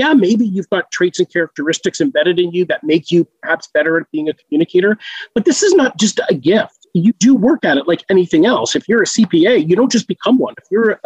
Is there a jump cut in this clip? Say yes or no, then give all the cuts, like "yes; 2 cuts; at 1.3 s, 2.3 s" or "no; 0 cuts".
no; 0 cuts